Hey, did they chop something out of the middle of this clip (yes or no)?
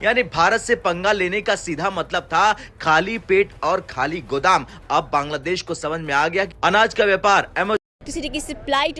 no